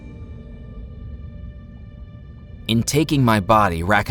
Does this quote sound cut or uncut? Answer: cut